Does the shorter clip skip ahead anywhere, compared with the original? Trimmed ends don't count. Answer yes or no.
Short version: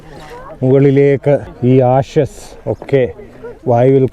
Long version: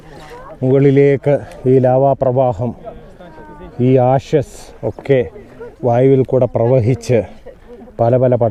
yes